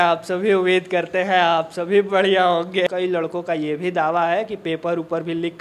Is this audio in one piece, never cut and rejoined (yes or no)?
no